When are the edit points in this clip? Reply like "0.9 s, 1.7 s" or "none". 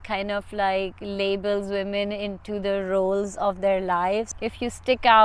4.2 s